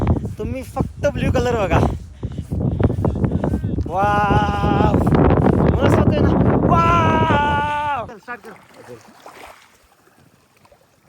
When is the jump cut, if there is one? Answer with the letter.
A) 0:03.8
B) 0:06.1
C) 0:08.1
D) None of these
C